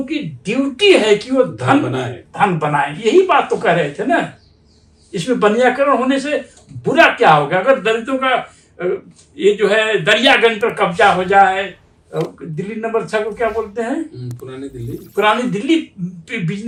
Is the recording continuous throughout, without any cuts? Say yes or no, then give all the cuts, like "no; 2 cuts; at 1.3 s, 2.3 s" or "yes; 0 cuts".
yes; 0 cuts